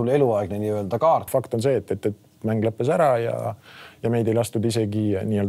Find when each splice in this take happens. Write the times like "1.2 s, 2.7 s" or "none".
1.3 s